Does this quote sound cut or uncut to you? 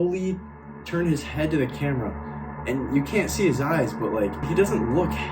cut